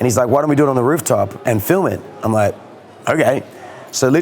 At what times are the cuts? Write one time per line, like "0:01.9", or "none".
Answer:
0:01.4